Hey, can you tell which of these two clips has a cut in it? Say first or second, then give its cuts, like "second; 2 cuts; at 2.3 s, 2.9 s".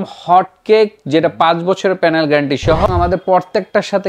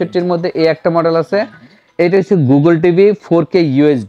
first; 1 cut; at 2.9 s